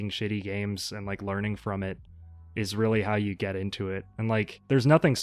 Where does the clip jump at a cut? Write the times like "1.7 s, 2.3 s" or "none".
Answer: none

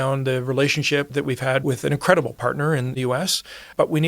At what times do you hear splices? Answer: 1.6 s, 2.9 s

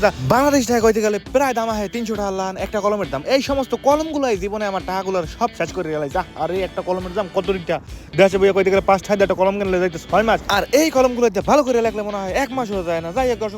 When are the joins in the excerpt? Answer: none

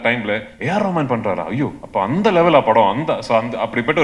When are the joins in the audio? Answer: none

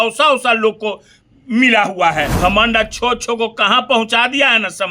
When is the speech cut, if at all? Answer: 2.3 s

